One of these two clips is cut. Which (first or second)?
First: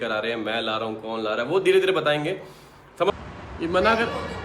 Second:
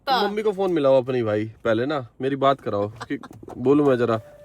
first